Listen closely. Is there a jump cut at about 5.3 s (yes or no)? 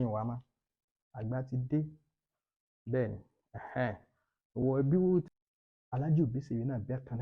yes